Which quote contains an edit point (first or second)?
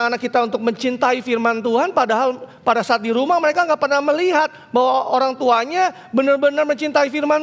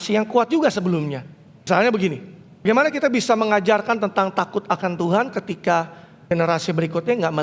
second